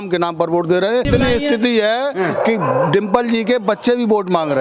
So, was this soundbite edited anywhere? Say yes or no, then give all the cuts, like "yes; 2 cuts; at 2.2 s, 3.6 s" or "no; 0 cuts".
yes; 1 cut; at 1.1 s